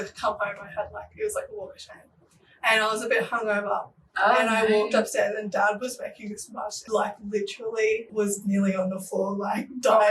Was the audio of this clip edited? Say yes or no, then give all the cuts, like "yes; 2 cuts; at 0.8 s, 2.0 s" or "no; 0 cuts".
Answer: no; 0 cuts